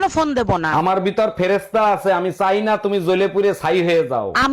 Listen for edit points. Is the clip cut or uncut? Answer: uncut